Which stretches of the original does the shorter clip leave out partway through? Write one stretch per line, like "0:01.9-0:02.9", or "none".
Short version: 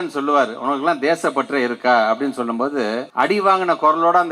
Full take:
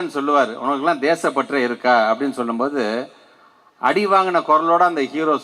0:03.1-0:03.7

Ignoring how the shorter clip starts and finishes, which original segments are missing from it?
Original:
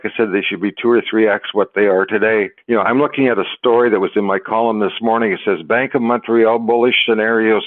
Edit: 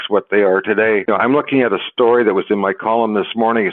0:02.5-0:02.7

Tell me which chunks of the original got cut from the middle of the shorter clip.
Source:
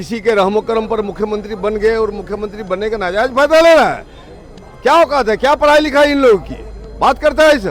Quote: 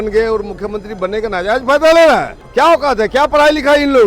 0:04.1-0:04.7

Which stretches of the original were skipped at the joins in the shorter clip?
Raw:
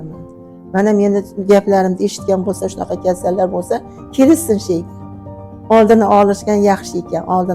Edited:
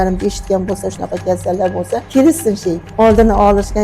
0:03.8-0:04.1
0:04.9-0:05.6

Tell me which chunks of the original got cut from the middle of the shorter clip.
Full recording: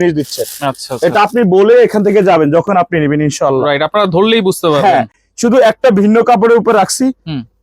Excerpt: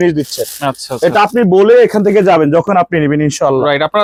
none

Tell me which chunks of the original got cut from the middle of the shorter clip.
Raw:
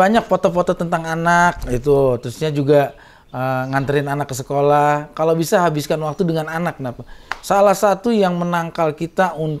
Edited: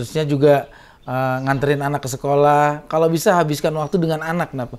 none

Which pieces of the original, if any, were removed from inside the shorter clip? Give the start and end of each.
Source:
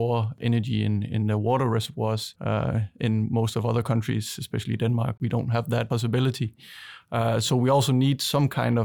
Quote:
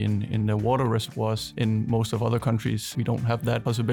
0:02.3-0:02.9
0:04.3-0:05.1

